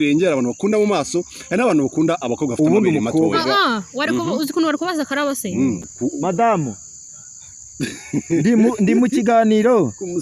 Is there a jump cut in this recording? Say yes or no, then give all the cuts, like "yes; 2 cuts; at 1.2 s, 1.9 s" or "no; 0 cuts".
yes; 1 cut; at 5.9 s